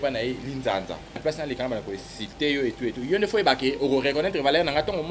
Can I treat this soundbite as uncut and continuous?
no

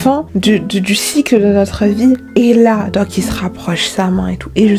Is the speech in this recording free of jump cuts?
yes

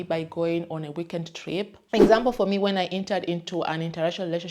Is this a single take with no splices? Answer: no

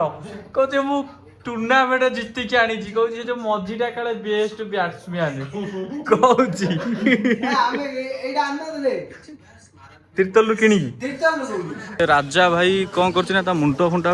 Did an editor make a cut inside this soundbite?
yes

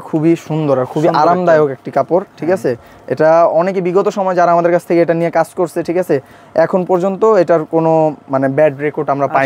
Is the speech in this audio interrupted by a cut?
no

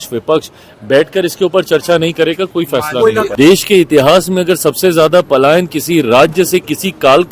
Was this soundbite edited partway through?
yes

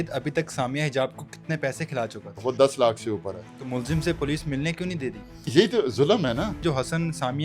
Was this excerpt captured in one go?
no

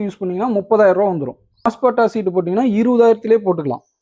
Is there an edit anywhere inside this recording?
yes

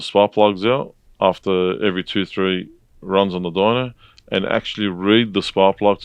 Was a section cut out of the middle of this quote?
no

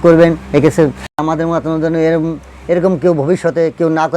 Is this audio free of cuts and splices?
no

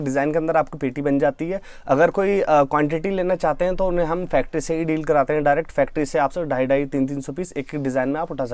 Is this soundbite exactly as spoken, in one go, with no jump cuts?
yes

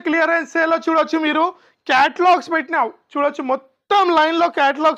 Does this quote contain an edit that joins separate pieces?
no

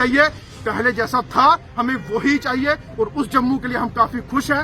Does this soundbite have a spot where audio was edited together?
no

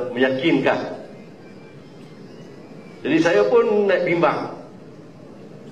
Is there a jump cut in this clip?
yes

